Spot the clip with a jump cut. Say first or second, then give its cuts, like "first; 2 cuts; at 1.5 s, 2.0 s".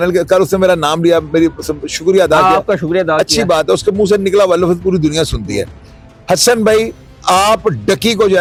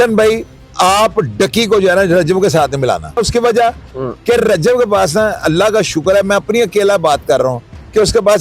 second; 1 cut; at 3.2 s